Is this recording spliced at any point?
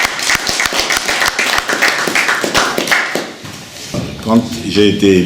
yes; 1 cut; at 4.0 s

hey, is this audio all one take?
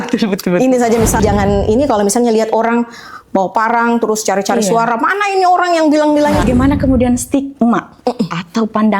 no; 2 cuts; at 1.2 s, 6.4 s

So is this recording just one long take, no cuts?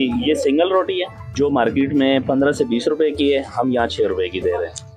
no; 1 cut; at 1.2 s

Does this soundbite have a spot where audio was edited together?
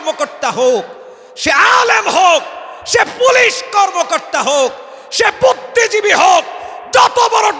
no; 0 cuts

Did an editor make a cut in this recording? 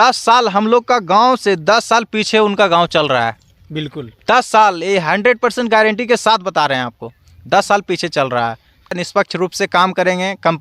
yes; 1 cut; at 8.9 s

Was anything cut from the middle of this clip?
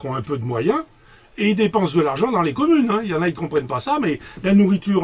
no; 0 cuts

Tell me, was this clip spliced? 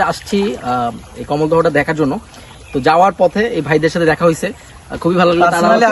no; 0 cuts

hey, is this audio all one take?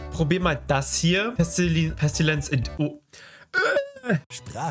yes; 0 cuts

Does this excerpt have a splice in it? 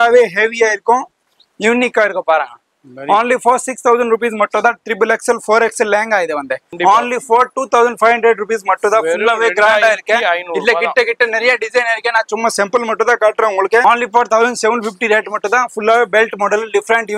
yes; 2 cuts; at 6.7 s, 13.8 s

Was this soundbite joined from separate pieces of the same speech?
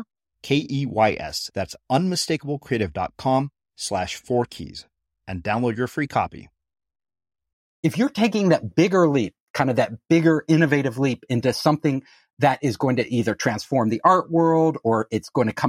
yes; 1 cut; at 7.7 s

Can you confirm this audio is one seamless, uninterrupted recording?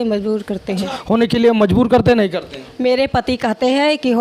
no; 1 cut; at 0.9 s

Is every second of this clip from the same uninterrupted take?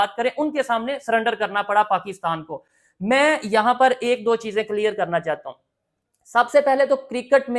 yes; 0 cuts

